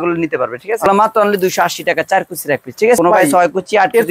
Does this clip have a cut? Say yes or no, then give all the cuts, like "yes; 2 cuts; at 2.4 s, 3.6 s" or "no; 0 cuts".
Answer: yes; 2 cuts; at 0.9 s, 3.0 s